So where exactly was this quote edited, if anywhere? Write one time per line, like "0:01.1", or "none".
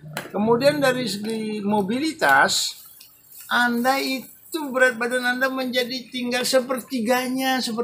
none